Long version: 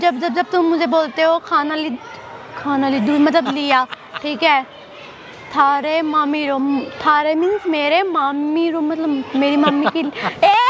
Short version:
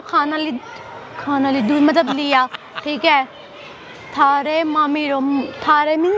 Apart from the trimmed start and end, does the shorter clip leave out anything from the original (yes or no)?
no